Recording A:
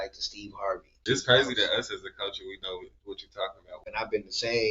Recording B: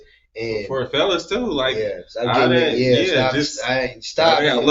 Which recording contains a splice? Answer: A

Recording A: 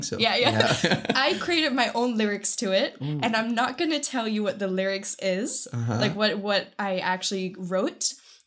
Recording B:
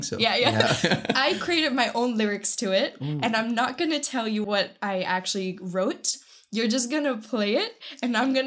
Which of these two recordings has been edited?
B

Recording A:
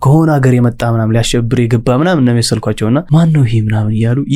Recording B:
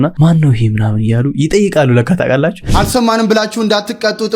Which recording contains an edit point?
B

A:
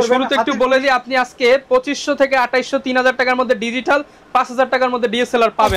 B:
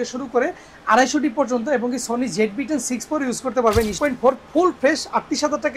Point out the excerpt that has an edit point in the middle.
B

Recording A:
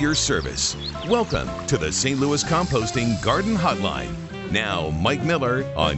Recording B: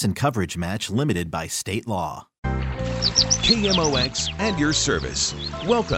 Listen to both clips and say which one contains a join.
B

